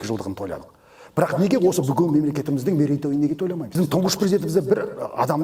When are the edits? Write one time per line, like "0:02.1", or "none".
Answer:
0:03.7